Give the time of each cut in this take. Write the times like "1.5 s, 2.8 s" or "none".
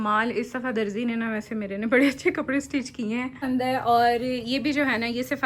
3.4 s